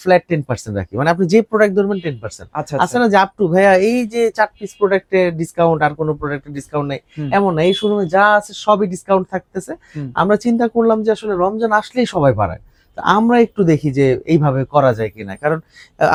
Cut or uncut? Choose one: uncut